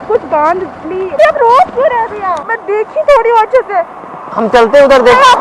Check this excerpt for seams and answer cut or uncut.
cut